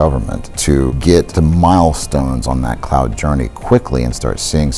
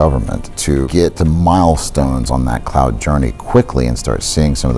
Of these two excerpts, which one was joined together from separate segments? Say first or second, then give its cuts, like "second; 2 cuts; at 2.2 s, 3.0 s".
second; 1 cut; at 1.1 s